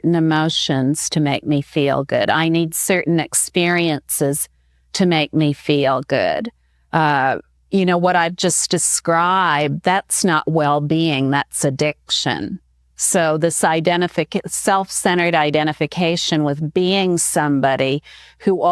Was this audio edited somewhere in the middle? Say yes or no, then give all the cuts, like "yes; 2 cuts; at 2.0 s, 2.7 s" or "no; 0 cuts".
no; 0 cuts